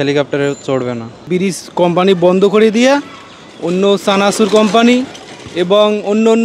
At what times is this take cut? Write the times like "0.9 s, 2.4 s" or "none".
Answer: 1.2 s